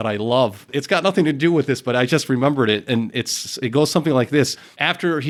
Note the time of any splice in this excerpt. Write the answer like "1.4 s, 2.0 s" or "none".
none